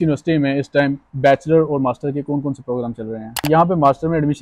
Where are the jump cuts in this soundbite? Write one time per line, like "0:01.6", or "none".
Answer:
0:03.5